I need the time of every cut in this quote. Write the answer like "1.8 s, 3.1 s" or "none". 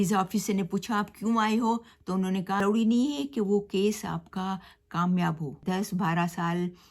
2.6 s, 5.6 s